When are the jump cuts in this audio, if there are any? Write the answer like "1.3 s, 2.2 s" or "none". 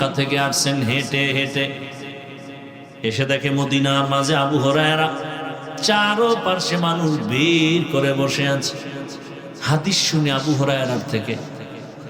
9.5 s